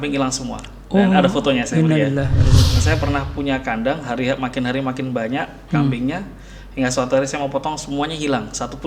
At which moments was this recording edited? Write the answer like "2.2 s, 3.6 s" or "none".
2.6 s